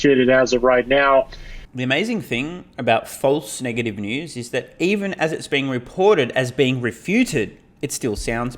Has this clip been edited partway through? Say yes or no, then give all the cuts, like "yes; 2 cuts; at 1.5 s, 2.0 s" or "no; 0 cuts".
no; 0 cuts